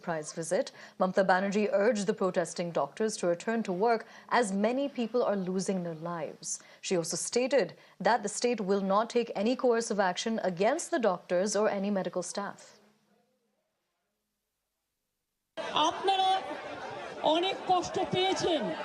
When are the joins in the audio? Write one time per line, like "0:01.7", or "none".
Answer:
0:09.6